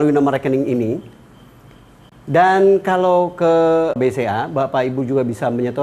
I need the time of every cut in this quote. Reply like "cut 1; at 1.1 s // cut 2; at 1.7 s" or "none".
none